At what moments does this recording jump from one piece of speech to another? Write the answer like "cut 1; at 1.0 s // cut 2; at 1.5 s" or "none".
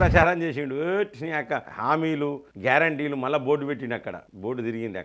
cut 1; at 1.7 s